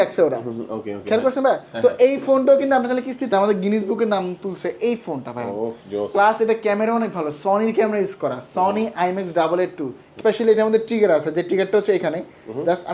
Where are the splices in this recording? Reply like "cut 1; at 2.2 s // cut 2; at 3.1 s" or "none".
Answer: cut 1; at 3.3 s // cut 2; at 10.2 s